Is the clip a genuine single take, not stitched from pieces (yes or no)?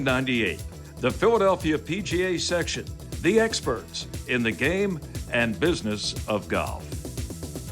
no